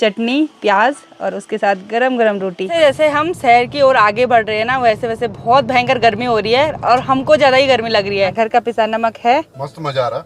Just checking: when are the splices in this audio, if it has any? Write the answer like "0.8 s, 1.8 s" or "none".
2.8 s, 8.3 s

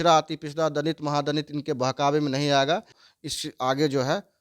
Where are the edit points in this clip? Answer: 3.0 s

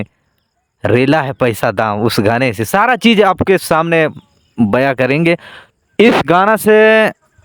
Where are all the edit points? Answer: 5.7 s

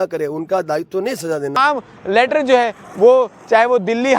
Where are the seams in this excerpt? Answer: 1.6 s

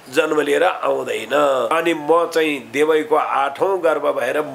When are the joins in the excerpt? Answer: 1.7 s

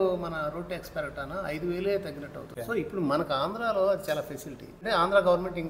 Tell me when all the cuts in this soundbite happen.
2.5 s, 4.8 s

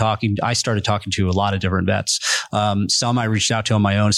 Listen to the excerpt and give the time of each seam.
none

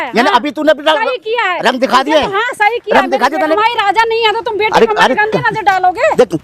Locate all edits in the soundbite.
3.6 s

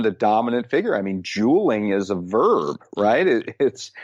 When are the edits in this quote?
none

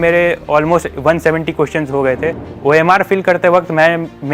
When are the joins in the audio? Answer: 2.5 s

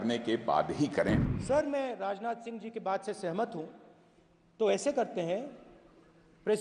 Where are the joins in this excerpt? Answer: 1.3 s

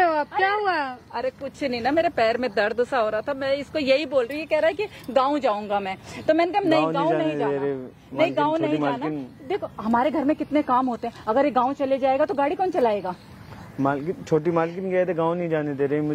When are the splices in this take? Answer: none

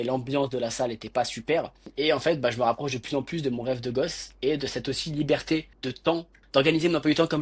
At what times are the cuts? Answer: 1.9 s, 6.1 s

